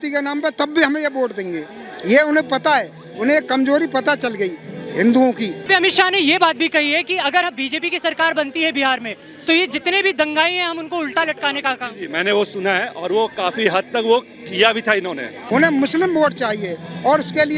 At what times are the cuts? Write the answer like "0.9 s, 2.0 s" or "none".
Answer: 5.7 s, 15.3 s